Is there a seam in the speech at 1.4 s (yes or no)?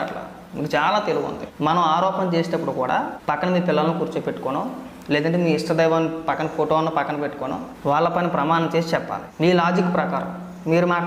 yes